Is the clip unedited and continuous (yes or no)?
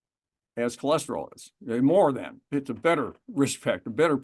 no